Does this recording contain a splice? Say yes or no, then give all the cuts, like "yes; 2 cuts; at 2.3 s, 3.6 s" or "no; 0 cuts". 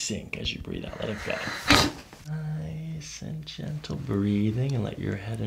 yes; 1 cut; at 2.3 s